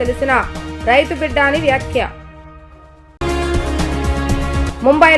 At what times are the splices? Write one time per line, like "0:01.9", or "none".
none